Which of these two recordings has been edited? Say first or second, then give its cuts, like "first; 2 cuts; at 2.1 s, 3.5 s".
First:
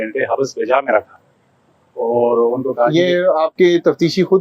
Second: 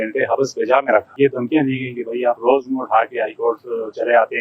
second; 1 cut; at 1.1 s